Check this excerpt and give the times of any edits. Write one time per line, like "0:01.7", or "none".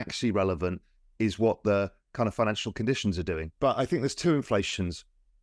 0:03.5